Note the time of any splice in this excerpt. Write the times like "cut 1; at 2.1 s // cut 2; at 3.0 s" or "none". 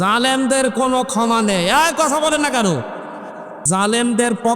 cut 1; at 3.6 s